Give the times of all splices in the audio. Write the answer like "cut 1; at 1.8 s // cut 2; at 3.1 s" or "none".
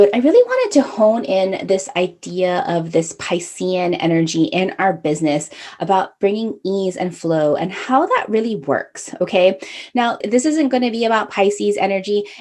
cut 1; at 10.2 s